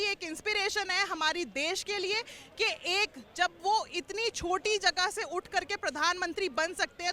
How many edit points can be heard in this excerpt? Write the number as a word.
zero